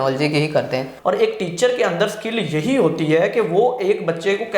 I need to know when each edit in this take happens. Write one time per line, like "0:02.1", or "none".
0:00.9